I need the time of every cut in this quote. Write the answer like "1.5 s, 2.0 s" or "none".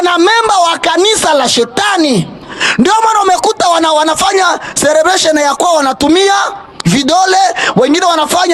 none